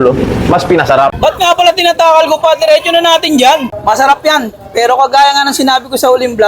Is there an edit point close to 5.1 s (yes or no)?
no